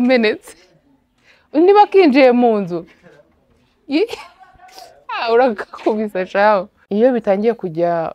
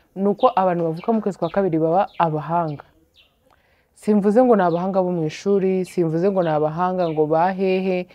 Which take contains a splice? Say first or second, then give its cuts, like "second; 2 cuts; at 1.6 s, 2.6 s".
first; 1 cut; at 6.8 s